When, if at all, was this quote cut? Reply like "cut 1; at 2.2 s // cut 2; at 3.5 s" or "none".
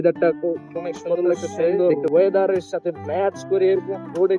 cut 1; at 1.8 s